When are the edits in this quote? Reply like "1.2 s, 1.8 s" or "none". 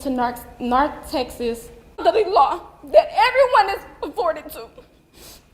2.0 s